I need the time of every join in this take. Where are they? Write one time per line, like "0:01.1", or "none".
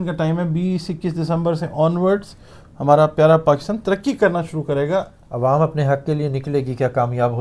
0:05.2